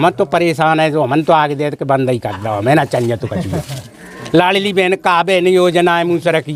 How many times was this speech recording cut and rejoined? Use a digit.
0